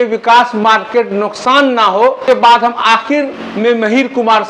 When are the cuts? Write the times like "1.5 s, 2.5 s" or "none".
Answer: 2.2 s